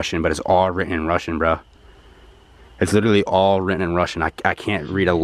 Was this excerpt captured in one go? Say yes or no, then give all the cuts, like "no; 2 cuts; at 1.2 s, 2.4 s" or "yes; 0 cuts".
yes; 0 cuts